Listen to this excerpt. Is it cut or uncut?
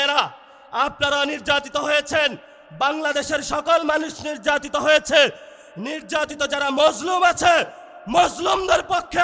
uncut